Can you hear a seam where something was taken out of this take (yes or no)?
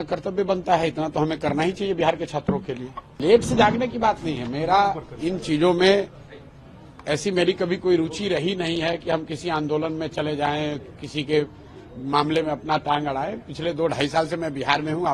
yes